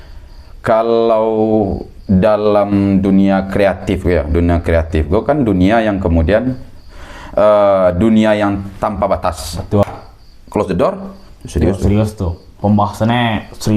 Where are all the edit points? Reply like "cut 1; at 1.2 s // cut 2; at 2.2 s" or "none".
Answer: cut 1; at 9.8 s

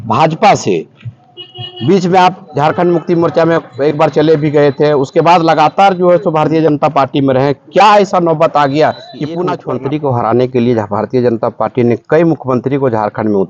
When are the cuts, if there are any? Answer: cut 1; at 9.6 s

